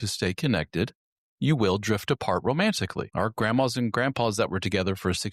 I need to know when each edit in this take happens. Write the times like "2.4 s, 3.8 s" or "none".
3.1 s